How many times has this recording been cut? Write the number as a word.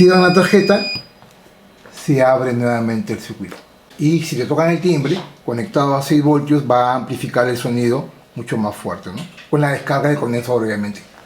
one